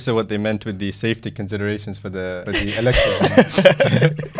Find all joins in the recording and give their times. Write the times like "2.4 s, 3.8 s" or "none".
2.4 s

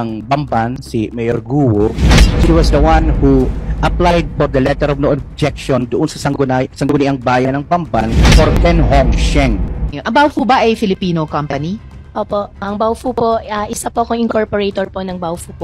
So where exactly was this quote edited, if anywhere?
9.9 s

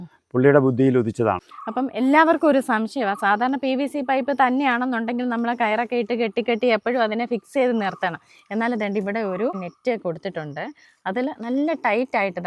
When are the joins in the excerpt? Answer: 1.5 s, 9.7 s

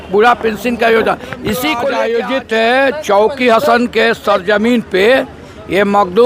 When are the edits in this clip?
1.8 s

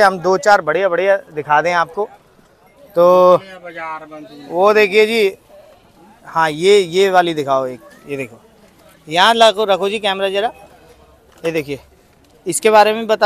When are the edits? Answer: none

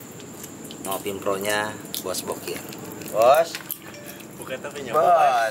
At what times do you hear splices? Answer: none

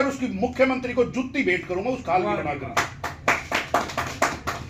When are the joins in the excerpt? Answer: none

